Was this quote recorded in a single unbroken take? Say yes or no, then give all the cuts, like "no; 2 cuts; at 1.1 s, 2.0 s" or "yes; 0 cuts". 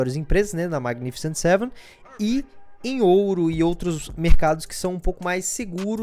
yes; 0 cuts